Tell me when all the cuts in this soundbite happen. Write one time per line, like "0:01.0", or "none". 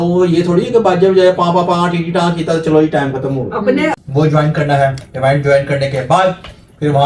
0:03.9